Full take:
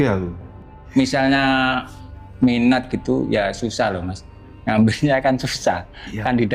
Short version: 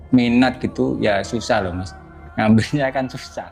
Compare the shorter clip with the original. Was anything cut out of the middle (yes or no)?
no